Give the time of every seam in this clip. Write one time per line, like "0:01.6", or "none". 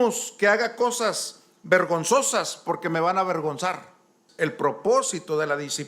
0:04.2